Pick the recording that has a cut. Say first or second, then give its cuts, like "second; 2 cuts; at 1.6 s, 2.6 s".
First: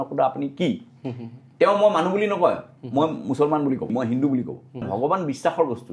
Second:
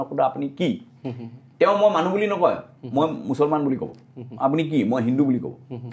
first; 2 cuts; at 3.9 s, 4.9 s